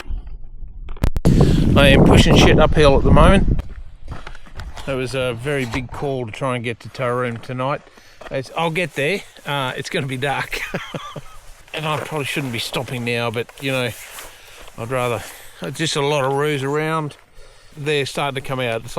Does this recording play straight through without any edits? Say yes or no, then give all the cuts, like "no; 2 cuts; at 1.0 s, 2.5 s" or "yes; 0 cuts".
no; 1 cut; at 17.7 s